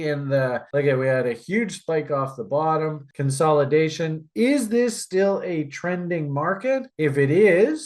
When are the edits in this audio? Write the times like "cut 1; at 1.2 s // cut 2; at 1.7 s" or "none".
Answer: cut 1; at 3.1 s